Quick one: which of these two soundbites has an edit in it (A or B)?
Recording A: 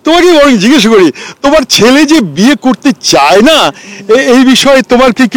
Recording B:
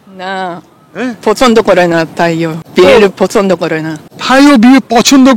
B